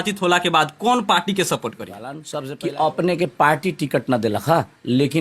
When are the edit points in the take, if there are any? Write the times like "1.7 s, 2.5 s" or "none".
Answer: 2.2 s